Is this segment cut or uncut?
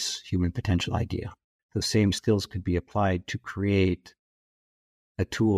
cut